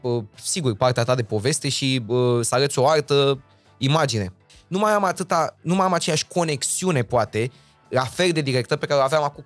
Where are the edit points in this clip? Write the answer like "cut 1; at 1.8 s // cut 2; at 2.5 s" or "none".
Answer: cut 1; at 4.5 s